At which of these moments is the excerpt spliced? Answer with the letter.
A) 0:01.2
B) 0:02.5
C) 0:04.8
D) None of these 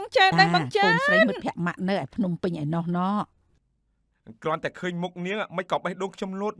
A